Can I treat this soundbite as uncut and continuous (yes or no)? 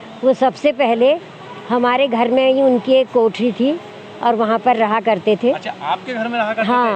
yes